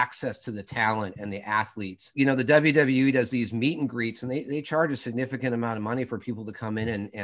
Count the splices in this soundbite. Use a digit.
1